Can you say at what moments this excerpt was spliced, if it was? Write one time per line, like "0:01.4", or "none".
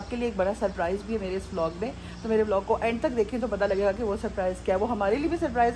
none